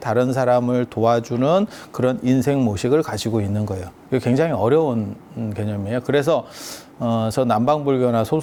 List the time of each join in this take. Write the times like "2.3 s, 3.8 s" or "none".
none